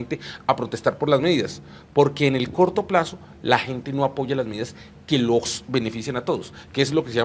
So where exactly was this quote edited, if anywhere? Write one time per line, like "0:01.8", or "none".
0:03.2